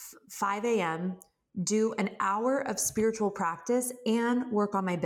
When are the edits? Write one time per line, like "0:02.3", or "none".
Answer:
none